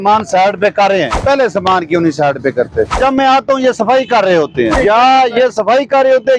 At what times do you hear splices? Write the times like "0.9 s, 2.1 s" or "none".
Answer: 1.2 s, 2.9 s, 4.7 s